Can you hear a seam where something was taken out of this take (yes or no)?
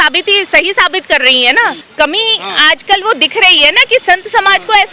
yes